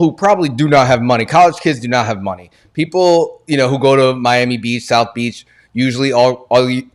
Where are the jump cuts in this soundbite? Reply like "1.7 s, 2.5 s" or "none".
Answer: none